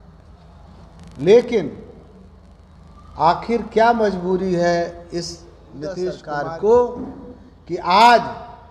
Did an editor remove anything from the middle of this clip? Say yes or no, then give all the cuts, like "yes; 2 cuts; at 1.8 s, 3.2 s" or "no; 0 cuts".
yes; 1 cut; at 6.3 s